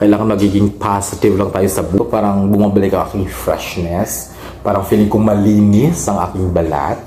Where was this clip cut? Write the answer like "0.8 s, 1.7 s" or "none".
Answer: 2.0 s